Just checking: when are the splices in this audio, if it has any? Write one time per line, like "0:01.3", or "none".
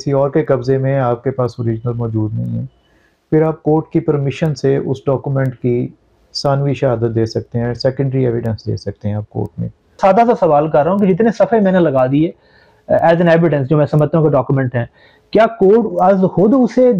0:09.9